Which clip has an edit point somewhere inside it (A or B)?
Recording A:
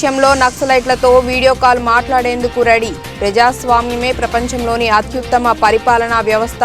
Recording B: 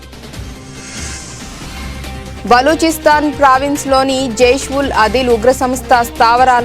B